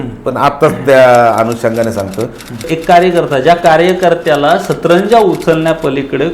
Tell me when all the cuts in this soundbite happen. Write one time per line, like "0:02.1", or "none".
0:02.7

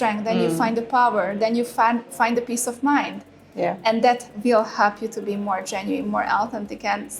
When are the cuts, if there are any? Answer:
none

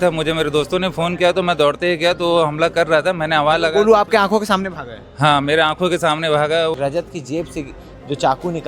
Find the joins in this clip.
0:06.7

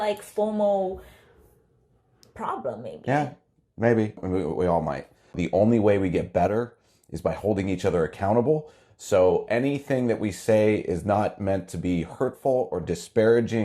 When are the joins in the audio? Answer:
0:05.4

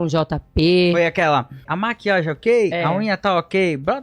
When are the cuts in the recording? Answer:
0:01.7

